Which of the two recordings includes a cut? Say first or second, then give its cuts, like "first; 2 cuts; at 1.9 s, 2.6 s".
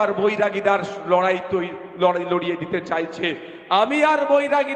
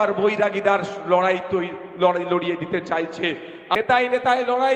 second; 1 cut; at 3.8 s